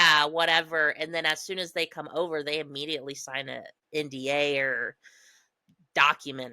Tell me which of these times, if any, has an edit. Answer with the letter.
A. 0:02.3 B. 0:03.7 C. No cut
B